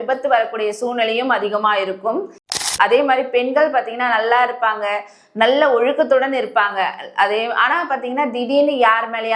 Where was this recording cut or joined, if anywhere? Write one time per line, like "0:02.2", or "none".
0:02.5